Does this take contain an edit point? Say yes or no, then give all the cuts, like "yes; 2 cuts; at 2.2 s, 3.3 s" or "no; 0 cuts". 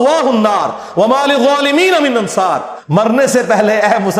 yes; 1 cut; at 3.1 s